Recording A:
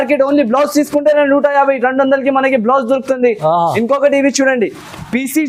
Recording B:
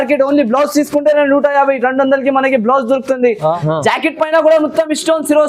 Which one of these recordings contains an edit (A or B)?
B